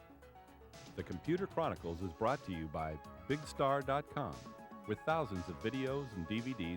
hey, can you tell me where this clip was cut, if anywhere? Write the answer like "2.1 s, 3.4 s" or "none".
0.9 s